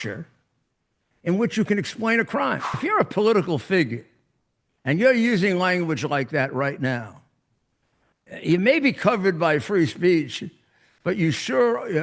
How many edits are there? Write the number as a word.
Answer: one